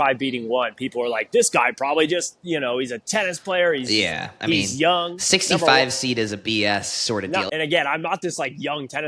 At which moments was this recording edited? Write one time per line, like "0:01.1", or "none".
0:07.5